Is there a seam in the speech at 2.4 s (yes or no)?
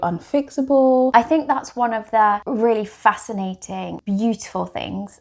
yes